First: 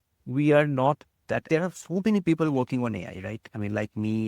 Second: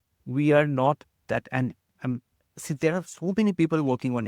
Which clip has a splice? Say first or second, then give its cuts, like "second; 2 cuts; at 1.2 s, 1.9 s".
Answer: first; 1 cut; at 1.4 s